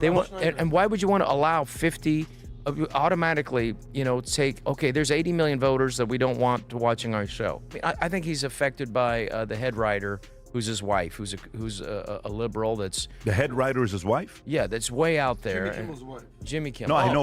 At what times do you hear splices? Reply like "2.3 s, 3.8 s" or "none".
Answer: 7.6 s